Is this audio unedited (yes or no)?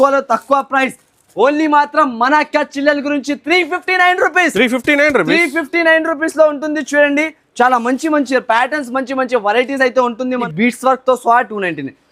no